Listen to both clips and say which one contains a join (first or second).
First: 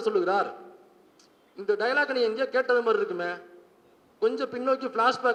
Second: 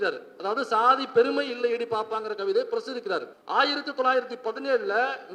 second